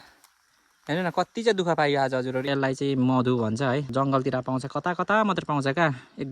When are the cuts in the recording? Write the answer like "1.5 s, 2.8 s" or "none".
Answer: 2.5 s, 3.9 s